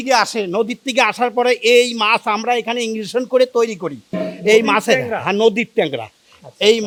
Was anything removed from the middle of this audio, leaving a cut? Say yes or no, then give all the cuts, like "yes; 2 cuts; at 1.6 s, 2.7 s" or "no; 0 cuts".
no; 0 cuts